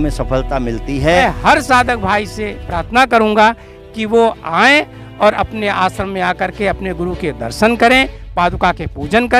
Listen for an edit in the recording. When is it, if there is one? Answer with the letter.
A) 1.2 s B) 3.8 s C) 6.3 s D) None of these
A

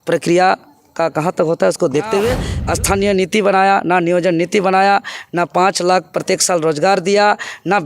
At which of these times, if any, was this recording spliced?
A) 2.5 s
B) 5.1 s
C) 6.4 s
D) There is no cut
A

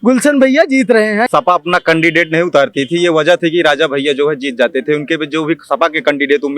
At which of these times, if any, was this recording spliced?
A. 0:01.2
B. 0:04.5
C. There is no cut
A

